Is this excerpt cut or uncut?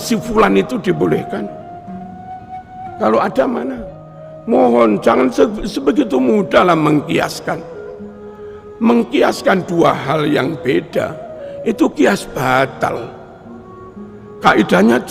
cut